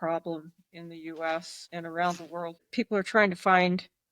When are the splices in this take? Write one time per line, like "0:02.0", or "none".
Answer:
0:01.6
0:02.6

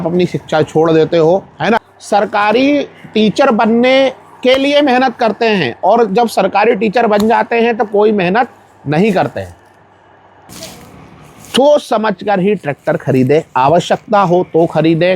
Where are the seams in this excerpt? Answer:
0:01.9
0:10.4

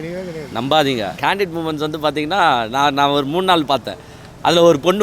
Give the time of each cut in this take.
0:01.2

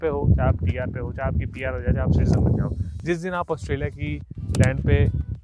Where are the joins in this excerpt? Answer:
none

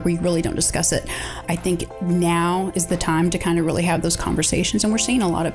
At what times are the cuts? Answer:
0:01.4

